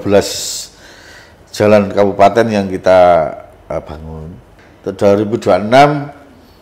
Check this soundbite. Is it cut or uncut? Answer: cut